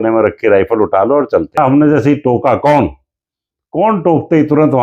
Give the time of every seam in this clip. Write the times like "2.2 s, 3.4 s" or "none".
1.6 s